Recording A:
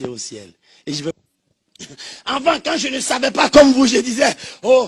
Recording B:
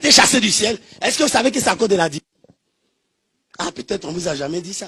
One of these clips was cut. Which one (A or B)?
A